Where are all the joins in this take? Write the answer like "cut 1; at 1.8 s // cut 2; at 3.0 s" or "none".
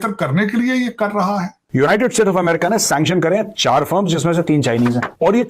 cut 1; at 1.6 s